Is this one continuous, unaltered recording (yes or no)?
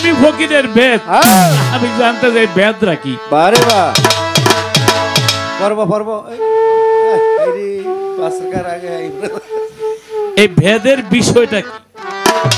yes